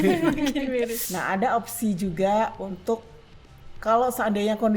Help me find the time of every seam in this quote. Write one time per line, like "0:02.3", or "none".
0:01.0